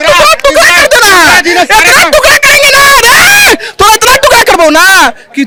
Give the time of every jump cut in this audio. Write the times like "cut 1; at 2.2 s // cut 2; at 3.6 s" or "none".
none

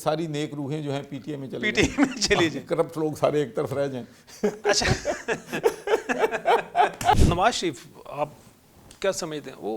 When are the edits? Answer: cut 1; at 7.2 s

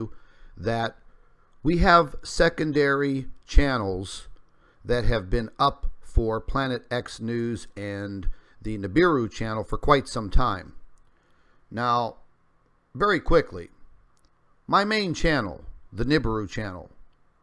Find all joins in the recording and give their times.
cut 1; at 8.7 s

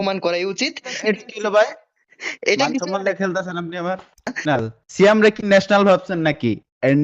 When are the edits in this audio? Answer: cut 1; at 0.9 s // cut 2; at 4.2 s

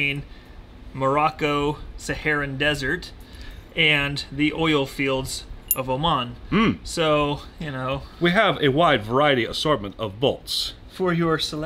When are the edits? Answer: none

